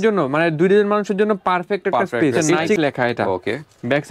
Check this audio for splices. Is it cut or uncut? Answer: cut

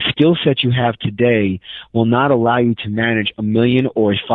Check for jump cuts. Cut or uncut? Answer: uncut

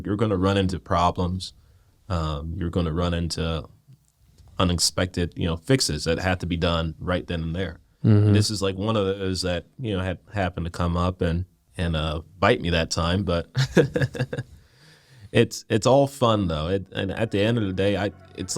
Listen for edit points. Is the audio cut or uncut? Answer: cut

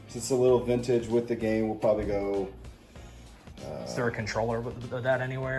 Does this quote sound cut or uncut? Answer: uncut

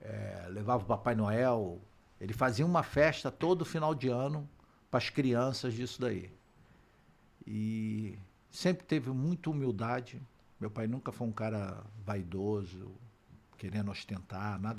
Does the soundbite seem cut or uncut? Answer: uncut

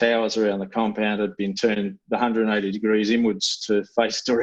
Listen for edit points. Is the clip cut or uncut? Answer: uncut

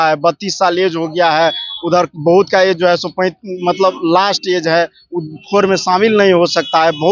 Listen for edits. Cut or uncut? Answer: uncut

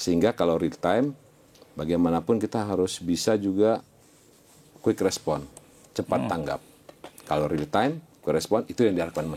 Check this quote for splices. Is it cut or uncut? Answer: uncut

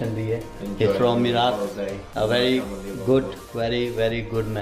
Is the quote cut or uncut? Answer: uncut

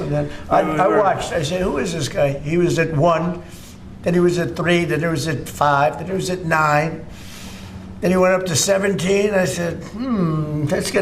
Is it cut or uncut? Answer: uncut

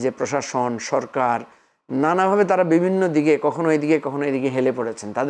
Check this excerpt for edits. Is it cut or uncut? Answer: uncut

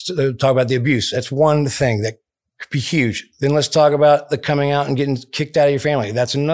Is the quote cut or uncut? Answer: uncut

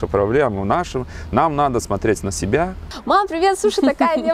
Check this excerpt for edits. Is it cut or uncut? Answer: cut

